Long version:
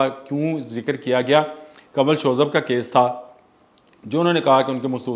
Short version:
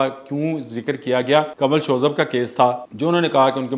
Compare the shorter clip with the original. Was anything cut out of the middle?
yes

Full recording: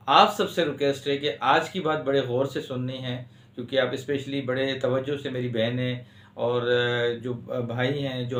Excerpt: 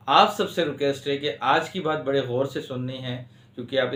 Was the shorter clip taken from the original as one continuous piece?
yes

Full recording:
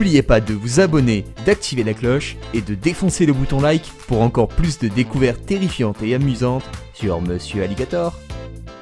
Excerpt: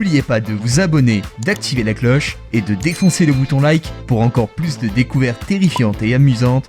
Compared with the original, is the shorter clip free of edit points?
yes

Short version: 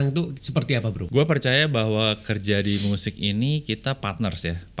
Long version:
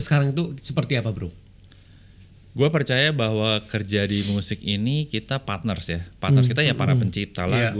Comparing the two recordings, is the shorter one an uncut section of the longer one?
no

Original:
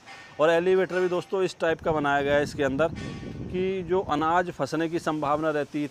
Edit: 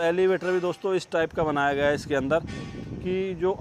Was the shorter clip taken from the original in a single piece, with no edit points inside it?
yes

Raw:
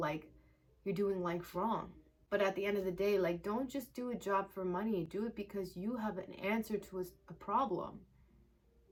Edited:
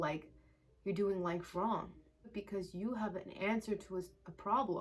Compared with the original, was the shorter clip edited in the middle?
yes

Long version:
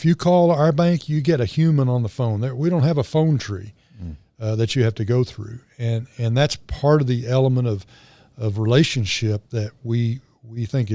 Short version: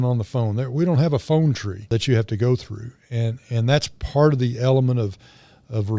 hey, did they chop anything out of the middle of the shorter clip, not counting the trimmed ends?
yes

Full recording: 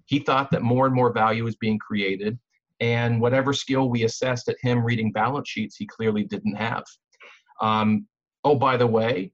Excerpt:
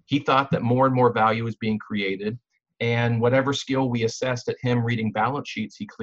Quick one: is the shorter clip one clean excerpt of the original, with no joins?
yes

